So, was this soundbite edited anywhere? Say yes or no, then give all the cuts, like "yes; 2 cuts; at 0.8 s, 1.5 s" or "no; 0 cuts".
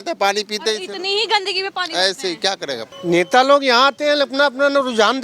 yes; 1 cut; at 2.9 s